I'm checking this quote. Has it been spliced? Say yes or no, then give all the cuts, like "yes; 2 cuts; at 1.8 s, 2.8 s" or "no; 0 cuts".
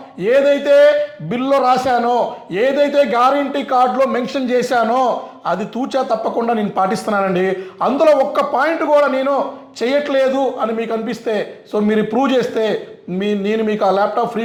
no; 0 cuts